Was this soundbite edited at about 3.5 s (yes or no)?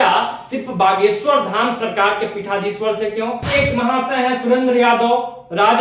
yes